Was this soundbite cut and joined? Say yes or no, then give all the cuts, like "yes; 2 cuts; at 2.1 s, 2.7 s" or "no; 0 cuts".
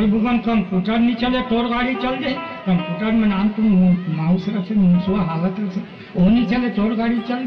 no; 0 cuts